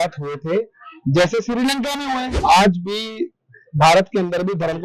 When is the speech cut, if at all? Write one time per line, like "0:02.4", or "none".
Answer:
0:02.3